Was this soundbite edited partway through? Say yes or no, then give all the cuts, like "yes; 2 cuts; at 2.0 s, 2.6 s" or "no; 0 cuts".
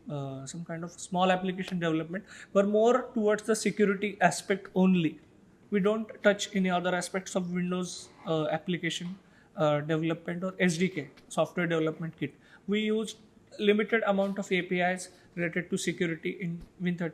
no; 0 cuts